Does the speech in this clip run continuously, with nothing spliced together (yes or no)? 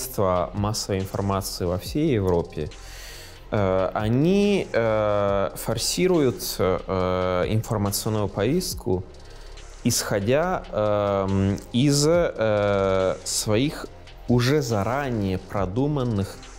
yes